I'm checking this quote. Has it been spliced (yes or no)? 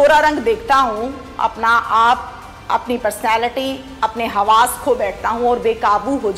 no